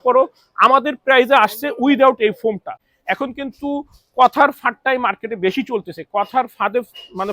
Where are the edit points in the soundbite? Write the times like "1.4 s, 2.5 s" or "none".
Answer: 2.9 s

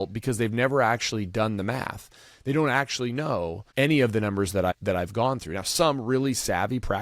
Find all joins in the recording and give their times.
3.6 s, 4.7 s

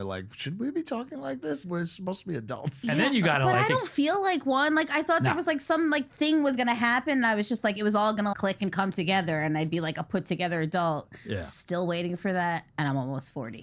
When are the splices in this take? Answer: 1.6 s, 8.3 s

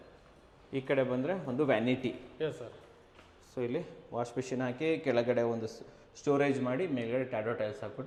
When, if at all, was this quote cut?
none

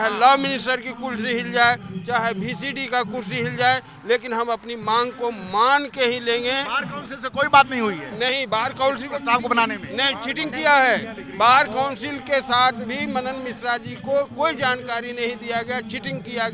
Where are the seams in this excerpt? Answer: none

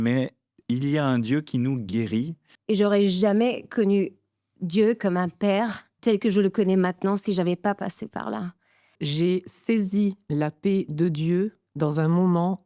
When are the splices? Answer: 2.5 s, 5.8 s, 9.0 s, 11.6 s

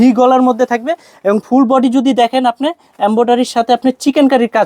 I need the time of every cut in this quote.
none

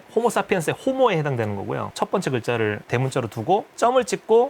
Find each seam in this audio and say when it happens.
1.9 s

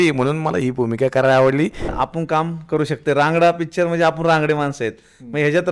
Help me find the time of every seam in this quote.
1.9 s

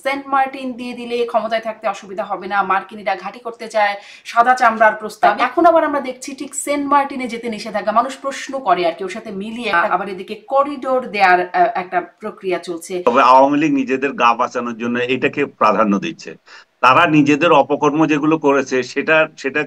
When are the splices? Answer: 5.3 s, 9.8 s, 13.0 s

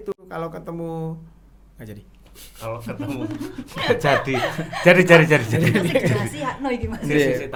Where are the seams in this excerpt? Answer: none

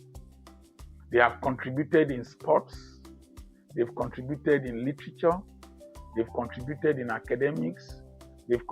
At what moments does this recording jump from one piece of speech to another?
1.1 s

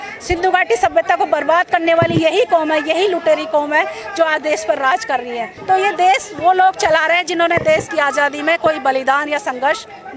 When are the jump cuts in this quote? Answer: 5.5 s

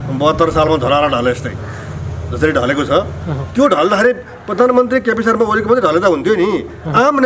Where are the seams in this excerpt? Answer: none

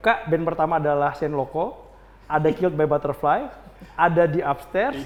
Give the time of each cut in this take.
none

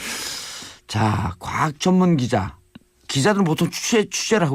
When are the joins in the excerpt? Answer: 1.7 s

